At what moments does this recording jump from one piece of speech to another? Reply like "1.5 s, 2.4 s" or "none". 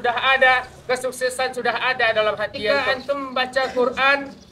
2.7 s